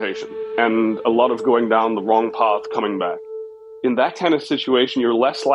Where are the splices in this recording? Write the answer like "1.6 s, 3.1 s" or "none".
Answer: 3.5 s